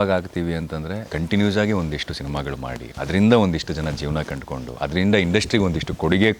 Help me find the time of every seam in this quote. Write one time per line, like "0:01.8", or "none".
0:01.0
0:02.9